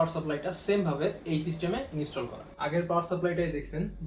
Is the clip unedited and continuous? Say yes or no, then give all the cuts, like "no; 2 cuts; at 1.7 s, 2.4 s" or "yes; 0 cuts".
no; 1 cut; at 2.4 s